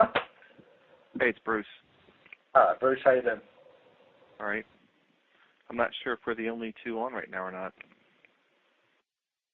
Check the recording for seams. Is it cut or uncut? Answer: uncut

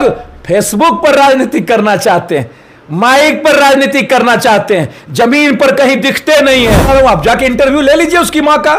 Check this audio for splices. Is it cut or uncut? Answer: cut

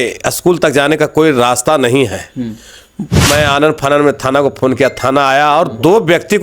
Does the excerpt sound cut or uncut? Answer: cut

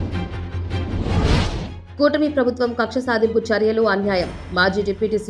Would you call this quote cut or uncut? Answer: uncut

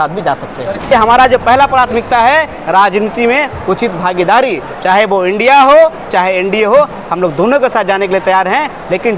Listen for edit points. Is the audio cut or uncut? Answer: cut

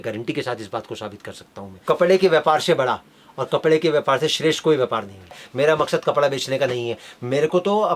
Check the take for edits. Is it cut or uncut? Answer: cut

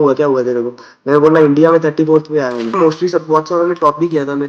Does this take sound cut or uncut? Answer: cut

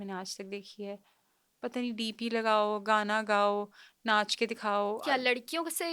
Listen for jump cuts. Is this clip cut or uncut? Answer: uncut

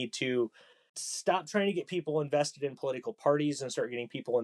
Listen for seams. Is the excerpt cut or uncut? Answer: uncut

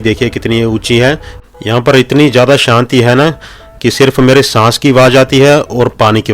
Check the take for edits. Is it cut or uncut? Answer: cut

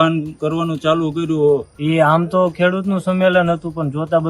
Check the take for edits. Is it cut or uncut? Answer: cut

